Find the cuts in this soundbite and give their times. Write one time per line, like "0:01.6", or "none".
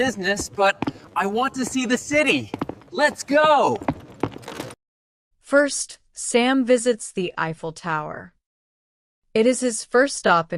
none